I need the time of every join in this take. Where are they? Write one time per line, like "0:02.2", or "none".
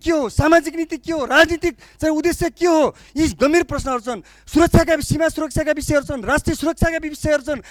none